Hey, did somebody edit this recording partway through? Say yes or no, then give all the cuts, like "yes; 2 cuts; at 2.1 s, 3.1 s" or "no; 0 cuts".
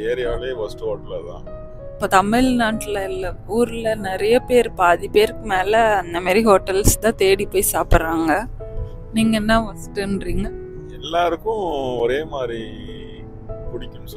yes; 1 cut; at 1.8 s